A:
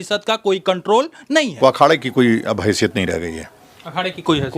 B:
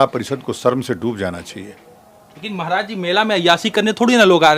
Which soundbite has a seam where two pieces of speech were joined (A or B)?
A